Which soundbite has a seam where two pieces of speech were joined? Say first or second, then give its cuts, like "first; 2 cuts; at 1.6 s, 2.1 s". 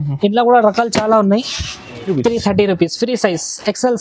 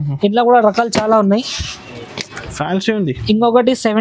first; 1 cut; at 2.1 s